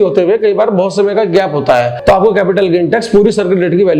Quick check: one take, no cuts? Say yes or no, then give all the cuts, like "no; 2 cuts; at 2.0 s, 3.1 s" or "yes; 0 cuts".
no; 1 cut; at 1.9 s